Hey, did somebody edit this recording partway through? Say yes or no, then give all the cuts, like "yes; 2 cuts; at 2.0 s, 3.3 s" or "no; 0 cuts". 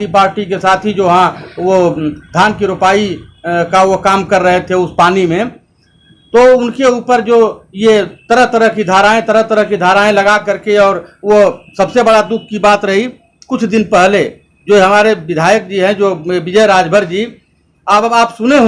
no; 0 cuts